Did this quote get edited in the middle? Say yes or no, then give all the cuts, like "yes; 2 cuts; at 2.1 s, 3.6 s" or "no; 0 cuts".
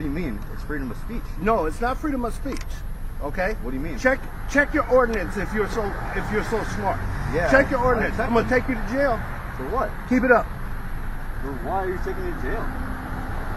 no; 0 cuts